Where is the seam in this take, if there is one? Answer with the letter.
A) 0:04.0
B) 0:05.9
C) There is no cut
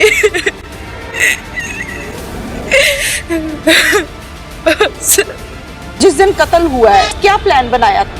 B